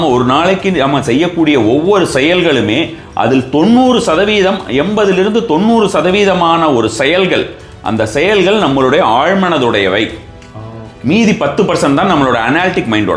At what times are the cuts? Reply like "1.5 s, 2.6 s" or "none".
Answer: none